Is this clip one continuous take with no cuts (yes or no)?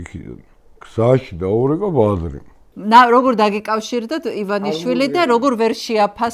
no